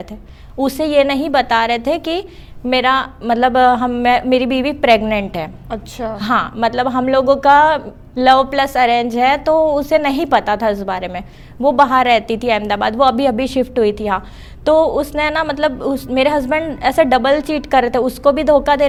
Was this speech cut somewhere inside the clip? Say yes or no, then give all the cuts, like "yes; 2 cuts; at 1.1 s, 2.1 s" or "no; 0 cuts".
no; 0 cuts